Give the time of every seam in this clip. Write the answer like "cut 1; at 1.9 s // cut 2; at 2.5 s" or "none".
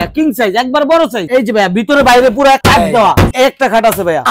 cut 1; at 1.2 s // cut 2; at 3.3 s